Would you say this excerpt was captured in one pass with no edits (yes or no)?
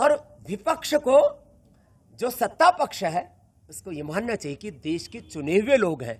yes